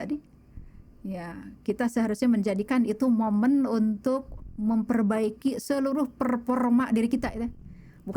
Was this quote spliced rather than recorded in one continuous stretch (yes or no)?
no